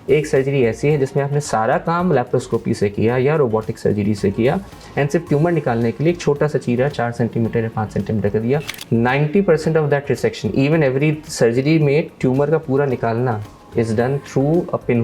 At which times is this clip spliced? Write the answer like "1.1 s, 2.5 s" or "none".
8.8 s